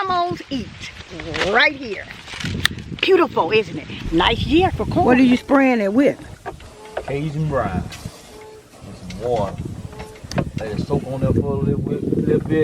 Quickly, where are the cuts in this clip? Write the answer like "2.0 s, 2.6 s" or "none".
5.0 s